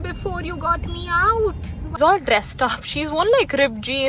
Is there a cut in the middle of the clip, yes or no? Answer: yes